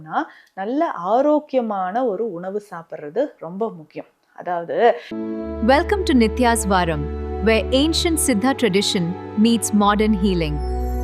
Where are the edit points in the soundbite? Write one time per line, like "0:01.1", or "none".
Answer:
0:05.1